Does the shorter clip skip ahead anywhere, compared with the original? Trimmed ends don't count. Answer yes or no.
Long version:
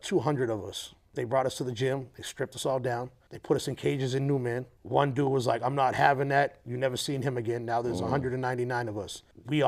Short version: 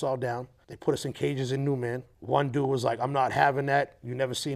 no